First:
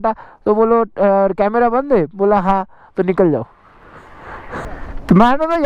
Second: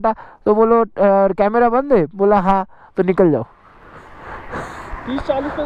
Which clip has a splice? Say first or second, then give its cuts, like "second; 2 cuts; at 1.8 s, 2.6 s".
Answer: first; 1 cut; at 4.7 s